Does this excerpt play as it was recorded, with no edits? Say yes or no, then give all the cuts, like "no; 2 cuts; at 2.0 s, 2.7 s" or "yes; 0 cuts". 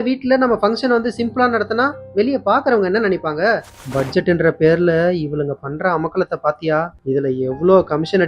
no; 2 cuts; at 3.8 s, 6.9 s